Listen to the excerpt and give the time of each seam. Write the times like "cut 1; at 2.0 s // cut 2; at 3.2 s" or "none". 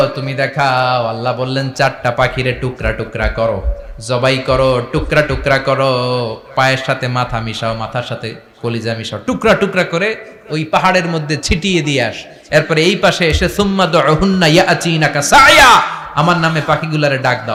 none